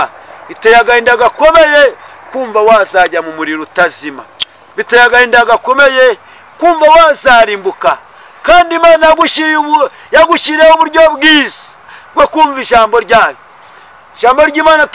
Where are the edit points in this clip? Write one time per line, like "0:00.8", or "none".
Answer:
none